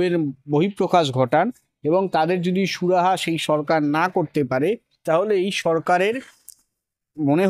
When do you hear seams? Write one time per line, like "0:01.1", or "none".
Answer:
none

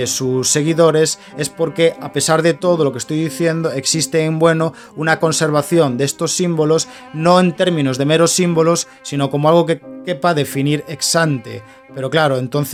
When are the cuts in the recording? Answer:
none

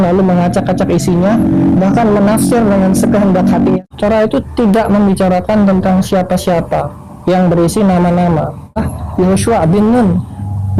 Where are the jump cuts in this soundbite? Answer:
0:03.8
0:08.9

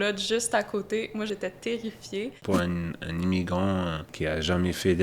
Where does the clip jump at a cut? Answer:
0:01.3
0:02.4
0:04.1

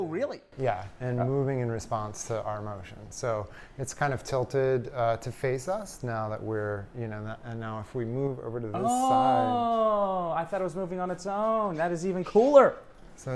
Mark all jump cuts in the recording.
none

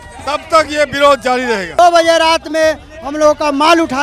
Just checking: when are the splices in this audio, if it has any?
0:01.8

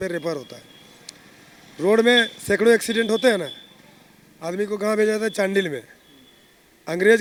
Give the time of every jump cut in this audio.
none

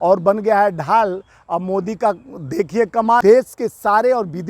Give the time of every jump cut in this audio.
0:03.2

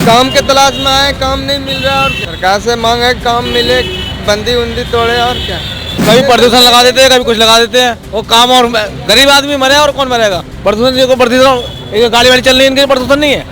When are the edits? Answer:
0:02.1
0:06.0
0:08.0
0:10.5

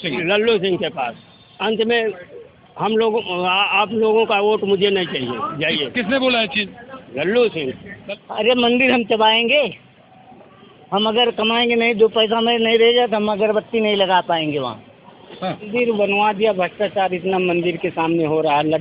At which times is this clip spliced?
0:08.0
0:15.7

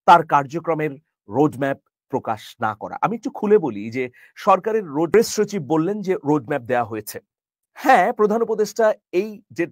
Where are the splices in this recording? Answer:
0:05.1

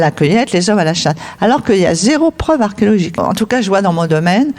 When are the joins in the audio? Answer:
0:03.2

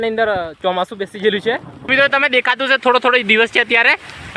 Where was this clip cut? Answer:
0:01.9

